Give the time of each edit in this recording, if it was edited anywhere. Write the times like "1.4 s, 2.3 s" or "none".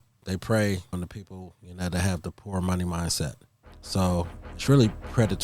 4.0 s